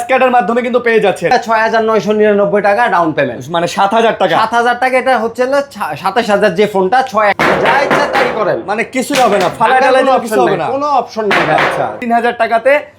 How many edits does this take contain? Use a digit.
3